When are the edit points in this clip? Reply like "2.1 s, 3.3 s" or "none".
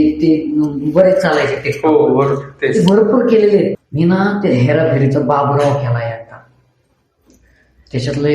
3.8 s